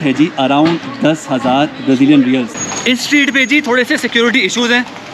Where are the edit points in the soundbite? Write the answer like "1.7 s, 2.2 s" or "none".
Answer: 2.6 s